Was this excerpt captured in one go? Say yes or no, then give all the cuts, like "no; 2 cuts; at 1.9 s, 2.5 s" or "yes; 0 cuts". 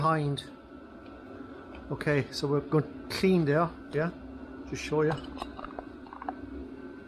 yes; 0 cuts